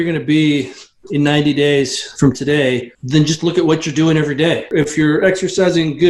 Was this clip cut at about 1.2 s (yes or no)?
no